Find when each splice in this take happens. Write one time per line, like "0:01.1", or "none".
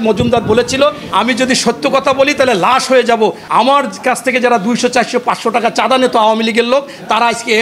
0:01.0
0:03.4